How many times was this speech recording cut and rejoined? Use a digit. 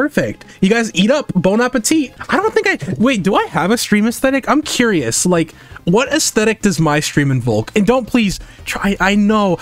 0